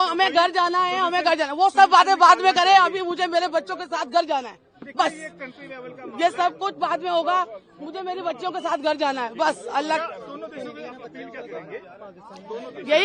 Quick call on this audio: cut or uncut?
uncut